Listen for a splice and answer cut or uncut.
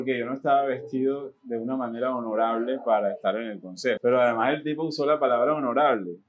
cut